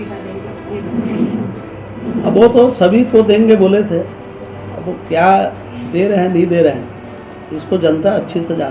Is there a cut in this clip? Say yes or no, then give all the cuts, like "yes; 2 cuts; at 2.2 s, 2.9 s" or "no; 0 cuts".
no; 0 cuts